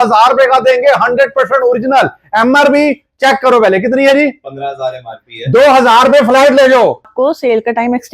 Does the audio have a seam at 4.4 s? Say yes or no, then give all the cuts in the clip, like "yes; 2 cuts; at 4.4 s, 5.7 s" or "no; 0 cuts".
no; 1 cut; at 7.1 s